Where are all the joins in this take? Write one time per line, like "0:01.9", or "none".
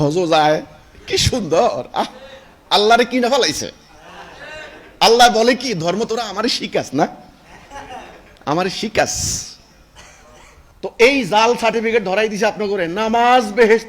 none